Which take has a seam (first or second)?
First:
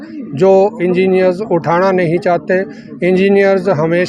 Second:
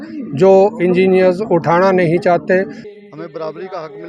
second